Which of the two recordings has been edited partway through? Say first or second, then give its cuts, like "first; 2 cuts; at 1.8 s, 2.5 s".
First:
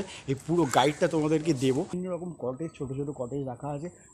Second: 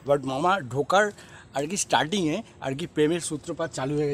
first; 1 cut; at 1.9 s